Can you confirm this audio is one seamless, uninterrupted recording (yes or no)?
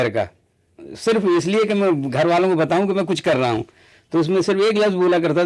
yes